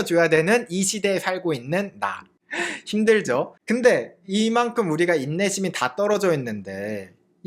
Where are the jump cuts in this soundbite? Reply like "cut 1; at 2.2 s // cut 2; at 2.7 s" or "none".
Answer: none